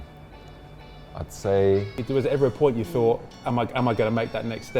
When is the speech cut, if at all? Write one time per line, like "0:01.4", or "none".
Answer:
0:02.0
0:03.3

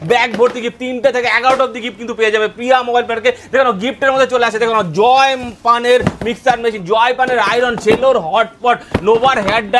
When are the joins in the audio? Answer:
none

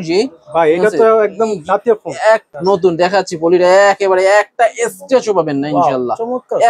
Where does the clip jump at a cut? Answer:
0:02.5

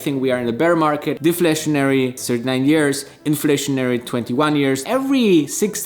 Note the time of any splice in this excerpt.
0:01.1
0:04.8

